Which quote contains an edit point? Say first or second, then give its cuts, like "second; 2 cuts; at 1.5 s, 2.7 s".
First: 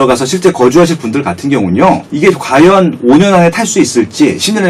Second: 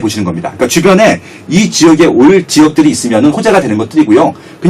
first; 1 cut; at 2.1 s